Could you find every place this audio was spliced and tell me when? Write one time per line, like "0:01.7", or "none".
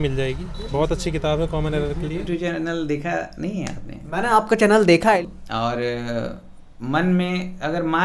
0:02.2
0:05.2

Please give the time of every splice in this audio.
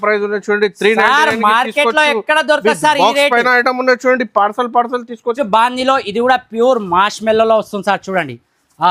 none

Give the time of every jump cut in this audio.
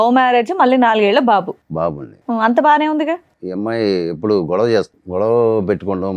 0:03.4
0:05.0

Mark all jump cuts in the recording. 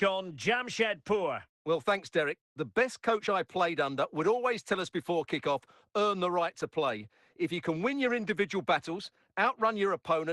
0:01.5

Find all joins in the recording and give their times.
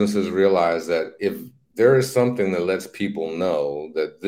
none

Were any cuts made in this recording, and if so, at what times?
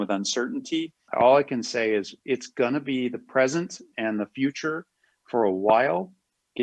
0:01.0

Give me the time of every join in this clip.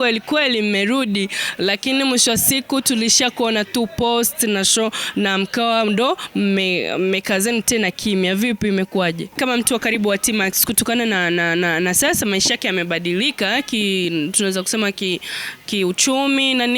0:09.4

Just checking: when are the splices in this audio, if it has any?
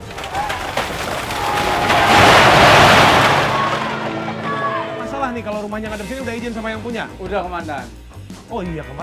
0:05.1

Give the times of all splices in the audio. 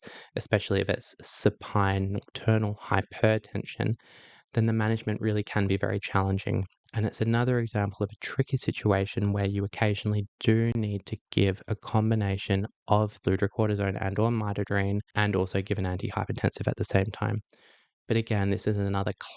0:13.2
0:15.1

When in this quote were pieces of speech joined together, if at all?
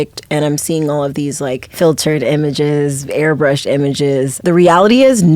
0:01.7
0:04.3

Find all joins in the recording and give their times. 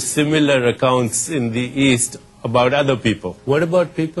0:03.3

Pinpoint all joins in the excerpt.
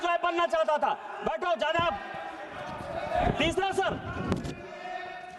none

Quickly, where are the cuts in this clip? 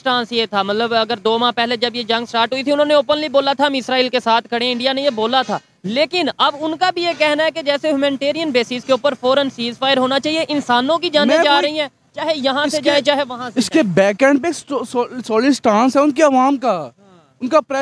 none

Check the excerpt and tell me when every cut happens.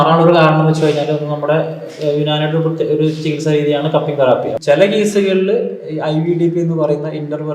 0:04.6

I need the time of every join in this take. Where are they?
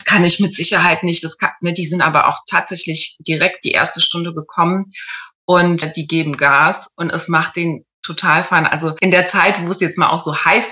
0:09.0

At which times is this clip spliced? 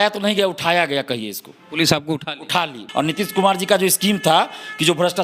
0:02.8

